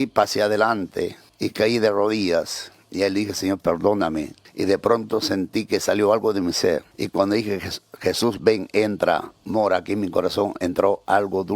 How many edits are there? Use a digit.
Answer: 3